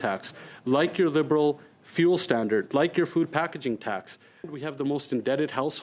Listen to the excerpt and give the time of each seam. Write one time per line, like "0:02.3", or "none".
0:04.5